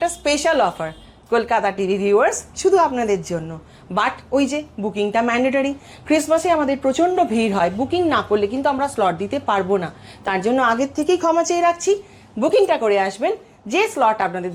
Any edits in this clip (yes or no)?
no